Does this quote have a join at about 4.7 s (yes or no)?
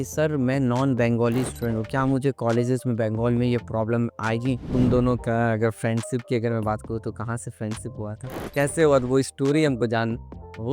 yes